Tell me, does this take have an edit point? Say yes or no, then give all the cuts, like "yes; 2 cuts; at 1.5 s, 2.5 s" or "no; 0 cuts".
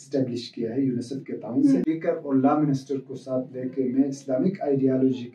yes; 1 cut; at 1.8 s